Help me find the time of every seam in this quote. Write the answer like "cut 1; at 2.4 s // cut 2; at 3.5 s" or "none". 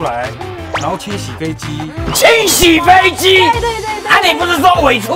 none